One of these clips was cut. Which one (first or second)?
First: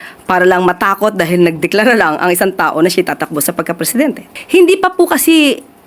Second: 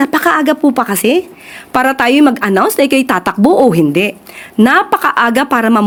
first